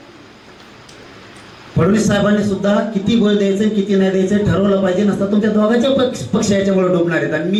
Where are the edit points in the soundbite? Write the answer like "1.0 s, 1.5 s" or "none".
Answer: none